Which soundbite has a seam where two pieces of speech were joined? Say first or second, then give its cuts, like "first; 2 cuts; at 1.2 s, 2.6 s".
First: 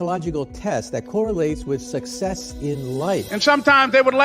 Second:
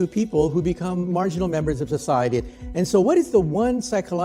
first; 1 cut; at 3.3 s